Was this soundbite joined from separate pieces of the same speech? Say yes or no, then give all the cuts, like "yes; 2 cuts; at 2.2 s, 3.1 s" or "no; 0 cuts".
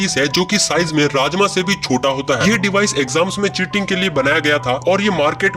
yes; 1 cut; at 2.4 s